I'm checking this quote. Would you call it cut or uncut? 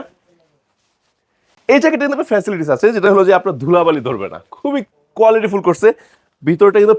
uncut